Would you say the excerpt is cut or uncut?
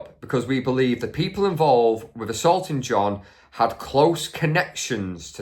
uncut